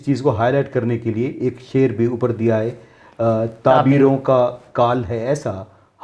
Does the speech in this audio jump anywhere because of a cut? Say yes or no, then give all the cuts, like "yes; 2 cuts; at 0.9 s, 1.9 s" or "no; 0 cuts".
no; 0 cuts